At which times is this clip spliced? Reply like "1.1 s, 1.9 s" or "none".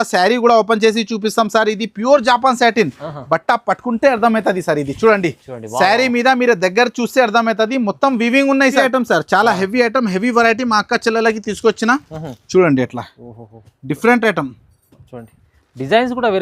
8.8 s